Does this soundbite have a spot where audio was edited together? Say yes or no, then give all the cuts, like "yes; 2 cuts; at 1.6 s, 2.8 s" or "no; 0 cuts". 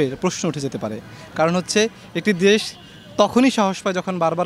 no; 0 cuts